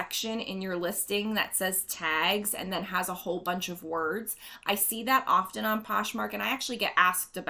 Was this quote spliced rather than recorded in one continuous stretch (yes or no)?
no